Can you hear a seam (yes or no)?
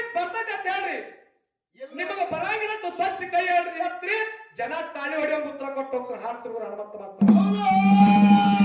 no